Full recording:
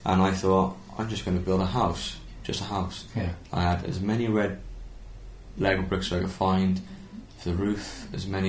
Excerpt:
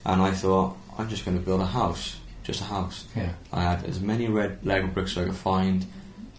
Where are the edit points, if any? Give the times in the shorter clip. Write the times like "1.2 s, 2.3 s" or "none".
4.6 s